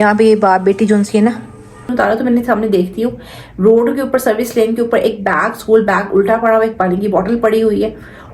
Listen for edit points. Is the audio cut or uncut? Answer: cut